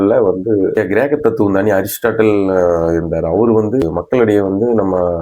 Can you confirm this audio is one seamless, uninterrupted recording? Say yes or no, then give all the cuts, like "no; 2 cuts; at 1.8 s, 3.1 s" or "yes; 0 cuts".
yes; 0 cuts